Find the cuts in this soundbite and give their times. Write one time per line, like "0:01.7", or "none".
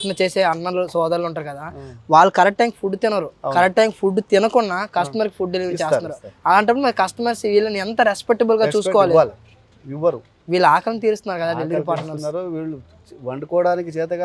none